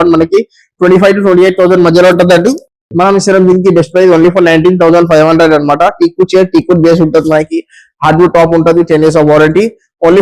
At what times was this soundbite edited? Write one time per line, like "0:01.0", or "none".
none